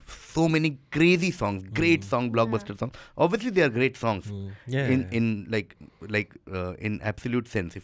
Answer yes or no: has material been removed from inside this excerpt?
no